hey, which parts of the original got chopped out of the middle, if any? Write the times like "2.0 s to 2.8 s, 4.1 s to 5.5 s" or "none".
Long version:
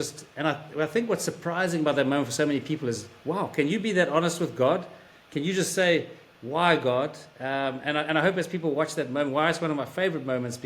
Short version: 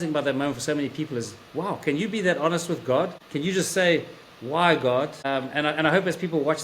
4.9 s to 5.2 s, 7.2 s to 7.5 s